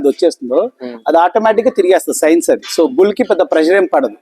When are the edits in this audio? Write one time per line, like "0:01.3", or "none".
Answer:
none

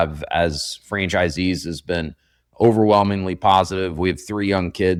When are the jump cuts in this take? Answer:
none

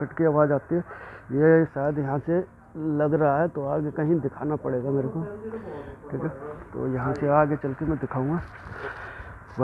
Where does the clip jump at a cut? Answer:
none

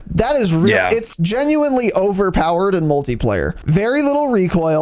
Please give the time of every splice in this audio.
0:03.6

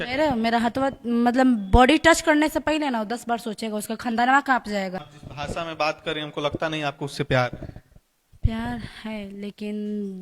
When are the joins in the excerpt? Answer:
0:05.1

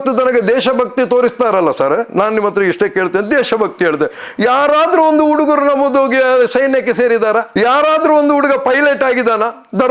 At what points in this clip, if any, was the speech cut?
none

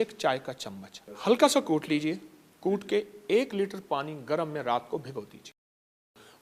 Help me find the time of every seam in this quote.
none

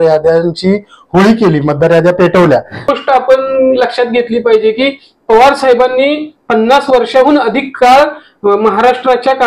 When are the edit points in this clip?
0:02.9

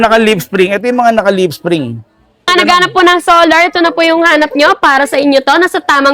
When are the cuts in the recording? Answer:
0:02.4

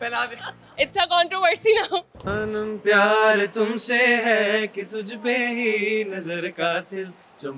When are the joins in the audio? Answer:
0:02.2

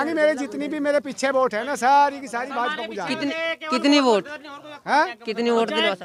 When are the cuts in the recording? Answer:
none

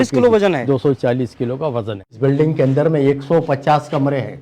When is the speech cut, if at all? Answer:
0:02.2

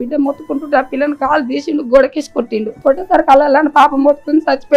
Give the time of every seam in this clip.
0:02.7

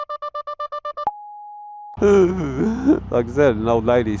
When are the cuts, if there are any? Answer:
0:01.9

